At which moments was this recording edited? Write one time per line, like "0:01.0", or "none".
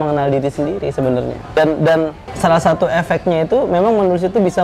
0:01.6
0:02.2

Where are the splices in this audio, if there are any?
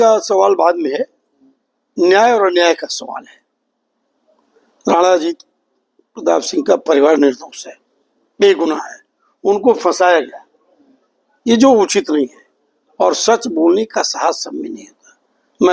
none

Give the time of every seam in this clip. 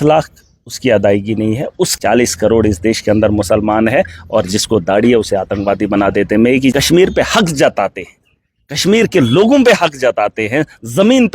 0:01.9
0:06.7

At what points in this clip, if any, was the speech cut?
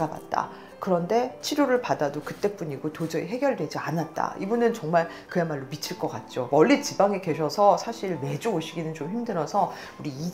0:01.4
0:06.5

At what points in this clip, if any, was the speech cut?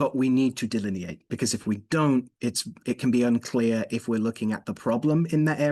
0:01.3

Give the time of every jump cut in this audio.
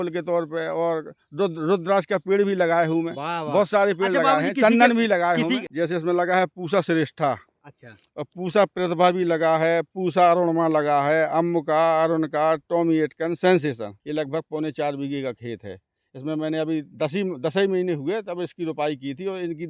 0:05.7
0:14.0

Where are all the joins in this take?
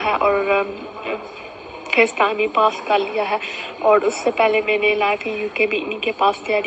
none

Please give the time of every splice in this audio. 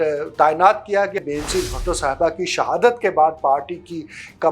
0:01.2

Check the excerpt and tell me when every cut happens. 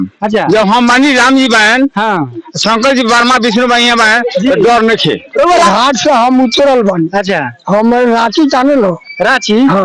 0:05.7

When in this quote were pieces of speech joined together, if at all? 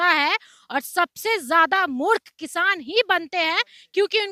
none

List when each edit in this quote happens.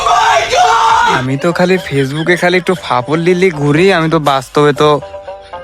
0:01.2

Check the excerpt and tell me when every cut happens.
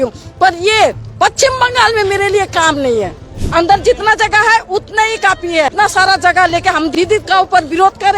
0:03.4
0:05.7
0:06.9

